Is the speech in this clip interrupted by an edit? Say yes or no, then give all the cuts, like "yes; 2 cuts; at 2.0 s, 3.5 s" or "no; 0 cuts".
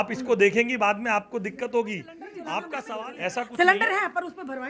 yes; 1 cut; at 2.8 s